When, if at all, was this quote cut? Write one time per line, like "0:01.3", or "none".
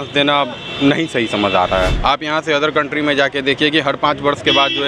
0:01.9